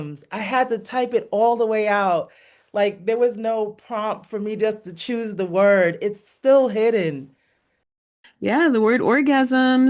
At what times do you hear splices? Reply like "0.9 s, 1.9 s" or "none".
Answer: 7.8 s